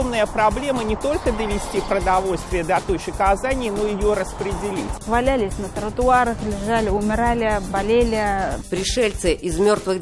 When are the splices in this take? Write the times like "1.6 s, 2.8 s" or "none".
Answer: none